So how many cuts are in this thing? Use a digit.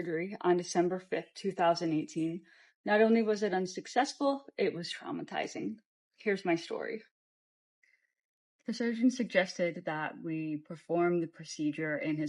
0